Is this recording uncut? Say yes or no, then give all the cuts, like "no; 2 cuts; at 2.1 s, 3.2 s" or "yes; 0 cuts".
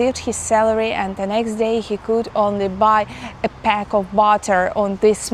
yes; 0 cuts